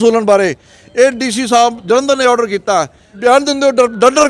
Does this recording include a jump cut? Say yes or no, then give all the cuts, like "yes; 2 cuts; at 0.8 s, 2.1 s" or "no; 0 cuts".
yes; 1 cut; at 3.0 s